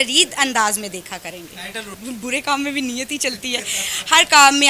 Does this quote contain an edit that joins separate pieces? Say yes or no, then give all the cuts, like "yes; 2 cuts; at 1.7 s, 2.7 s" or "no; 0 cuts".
yes; 1 cut; at 2.0 s